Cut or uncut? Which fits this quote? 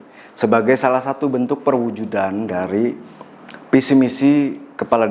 uncut